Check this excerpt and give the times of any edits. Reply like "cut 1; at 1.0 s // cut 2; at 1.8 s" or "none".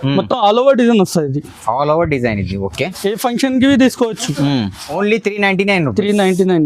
cut 1; at 4.8 s